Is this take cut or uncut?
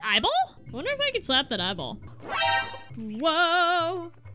uncut